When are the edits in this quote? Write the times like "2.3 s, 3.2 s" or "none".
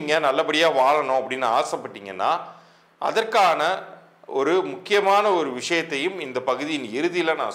none